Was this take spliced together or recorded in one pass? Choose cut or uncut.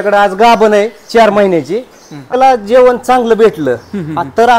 cut